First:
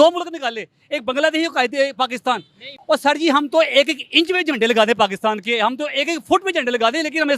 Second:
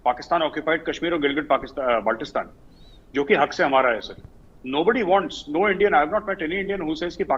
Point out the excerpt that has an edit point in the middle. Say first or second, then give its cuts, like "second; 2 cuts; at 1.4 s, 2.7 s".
first; 1 cut; at 2.7 s